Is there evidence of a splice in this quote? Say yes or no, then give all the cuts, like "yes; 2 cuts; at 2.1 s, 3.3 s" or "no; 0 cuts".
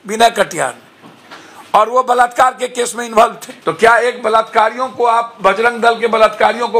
yes; 1 cut; at 3.5 s